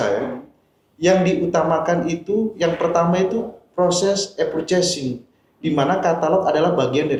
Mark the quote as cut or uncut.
uncut